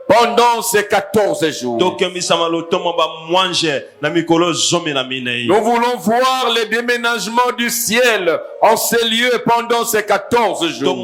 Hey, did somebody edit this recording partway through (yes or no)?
no